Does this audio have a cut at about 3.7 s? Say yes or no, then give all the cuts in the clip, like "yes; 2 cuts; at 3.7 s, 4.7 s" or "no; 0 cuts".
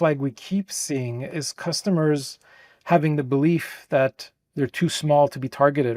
no; 1 cut; at 1.3 s